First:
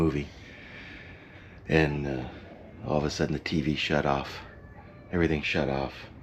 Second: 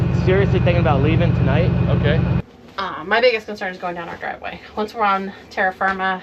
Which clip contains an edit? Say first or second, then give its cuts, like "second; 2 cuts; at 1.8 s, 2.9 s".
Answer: second; 1 cut; at 2.4 s